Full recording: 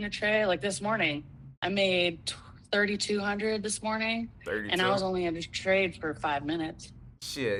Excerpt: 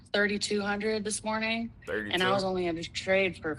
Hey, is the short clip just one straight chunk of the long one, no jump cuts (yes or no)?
yes